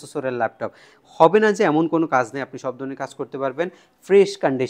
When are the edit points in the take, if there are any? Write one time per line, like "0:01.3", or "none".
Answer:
none